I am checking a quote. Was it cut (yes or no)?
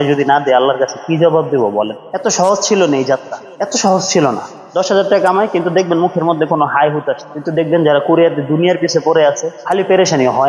yes